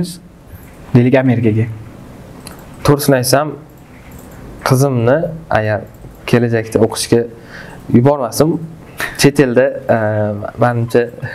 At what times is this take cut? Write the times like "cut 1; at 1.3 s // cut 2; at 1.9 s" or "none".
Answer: none